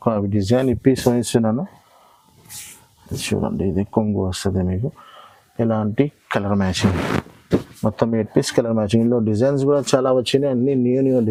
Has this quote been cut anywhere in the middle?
no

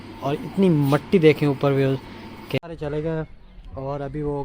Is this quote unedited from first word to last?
no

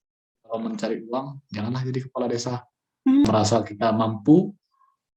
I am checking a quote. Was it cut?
yes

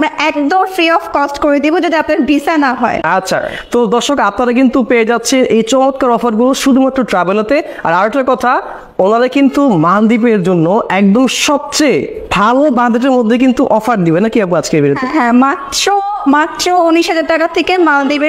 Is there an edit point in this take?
no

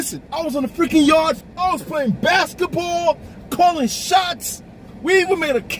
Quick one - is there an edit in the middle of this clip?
yes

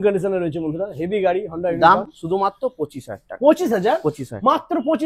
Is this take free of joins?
yes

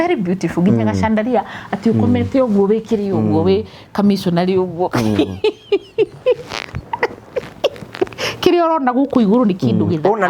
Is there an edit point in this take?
no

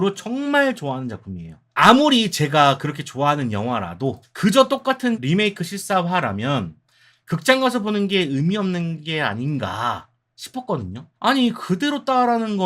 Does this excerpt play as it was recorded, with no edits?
no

